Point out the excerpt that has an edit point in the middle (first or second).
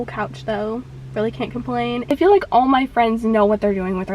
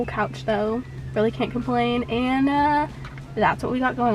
first